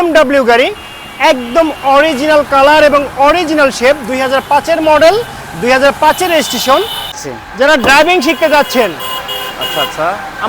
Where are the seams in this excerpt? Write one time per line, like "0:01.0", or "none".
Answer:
0:07.2